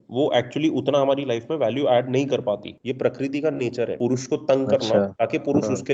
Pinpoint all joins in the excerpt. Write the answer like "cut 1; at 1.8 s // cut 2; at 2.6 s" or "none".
cut 1; at 2.7 s // cut 2; at 3.9 s // cut 3; at 5.1 s